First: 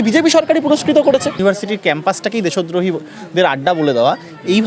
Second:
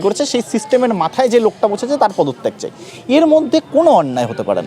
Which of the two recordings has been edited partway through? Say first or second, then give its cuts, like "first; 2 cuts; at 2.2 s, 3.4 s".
first; 1 cut; at 1.4 s